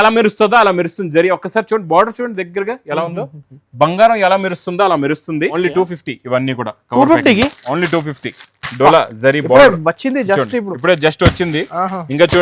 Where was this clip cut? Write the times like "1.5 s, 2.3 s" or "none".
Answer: 5.5 s

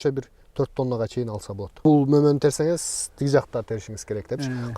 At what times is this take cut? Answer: 1.7 s

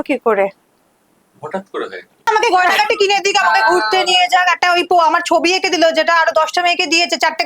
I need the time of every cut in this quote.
2.2 s

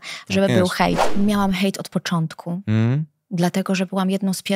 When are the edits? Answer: 1.1 s

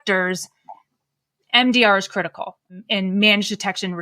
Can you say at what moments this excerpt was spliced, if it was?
2.7 s

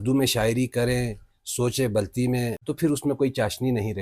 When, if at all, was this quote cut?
2.6 s

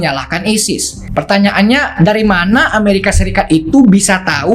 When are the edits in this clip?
1.0 s

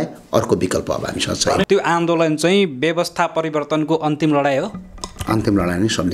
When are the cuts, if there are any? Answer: 1.7 s

